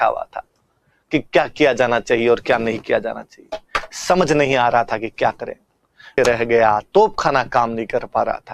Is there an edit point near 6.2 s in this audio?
yes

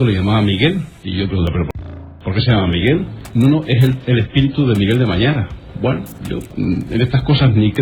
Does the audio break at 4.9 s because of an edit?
no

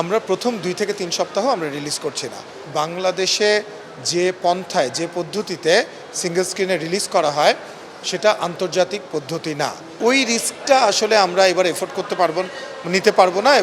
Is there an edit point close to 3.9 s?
no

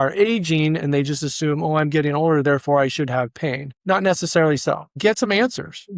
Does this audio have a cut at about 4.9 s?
yes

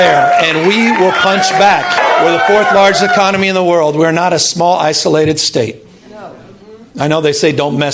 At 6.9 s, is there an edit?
no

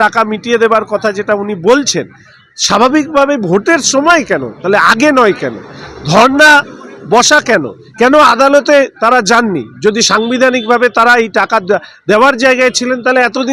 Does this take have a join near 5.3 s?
no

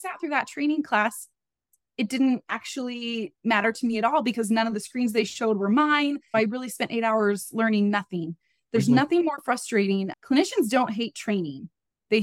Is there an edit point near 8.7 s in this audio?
no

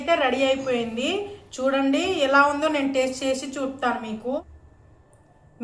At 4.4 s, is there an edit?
yes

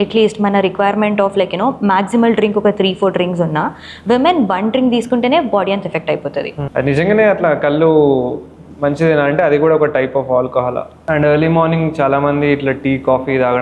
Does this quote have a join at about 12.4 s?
no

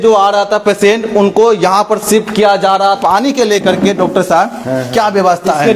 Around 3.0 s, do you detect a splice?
yes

